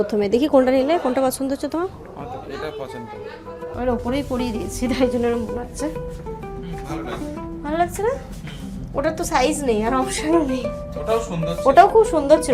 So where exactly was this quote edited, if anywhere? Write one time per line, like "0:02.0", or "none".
0:03.7